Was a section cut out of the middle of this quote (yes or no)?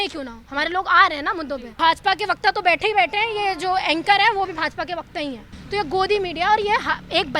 yes